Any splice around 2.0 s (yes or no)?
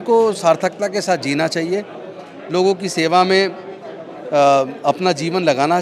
no